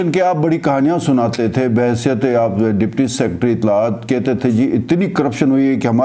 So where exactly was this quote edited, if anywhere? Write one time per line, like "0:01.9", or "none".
none